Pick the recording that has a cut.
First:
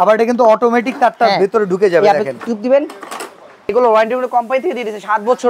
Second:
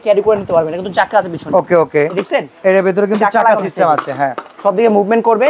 first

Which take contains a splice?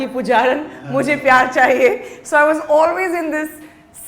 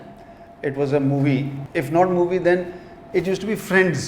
second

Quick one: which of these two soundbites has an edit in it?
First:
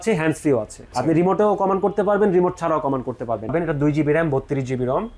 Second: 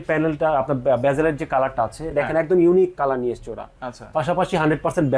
first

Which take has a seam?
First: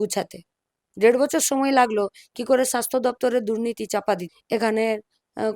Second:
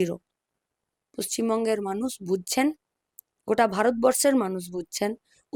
first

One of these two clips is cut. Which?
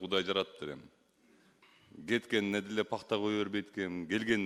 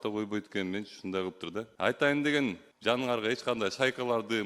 second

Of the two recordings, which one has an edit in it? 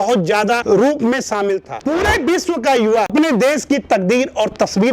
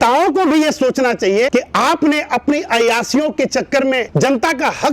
first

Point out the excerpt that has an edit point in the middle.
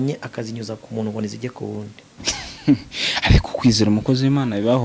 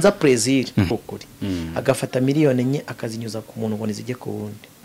second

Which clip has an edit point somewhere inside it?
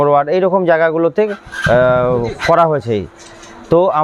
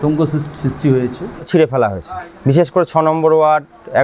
second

